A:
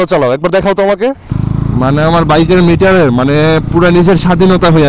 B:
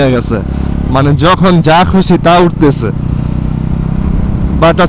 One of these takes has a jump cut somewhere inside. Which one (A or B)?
A